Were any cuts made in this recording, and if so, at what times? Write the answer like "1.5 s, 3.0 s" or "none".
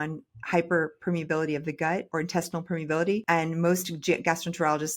2.1 s, 3.2 s